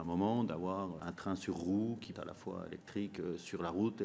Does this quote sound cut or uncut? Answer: cut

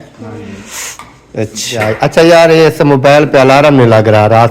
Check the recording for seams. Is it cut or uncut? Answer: cut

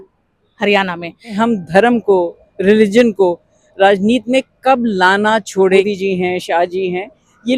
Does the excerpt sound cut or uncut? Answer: cut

